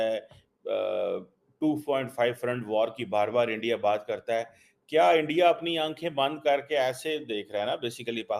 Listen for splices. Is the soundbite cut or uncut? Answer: uncut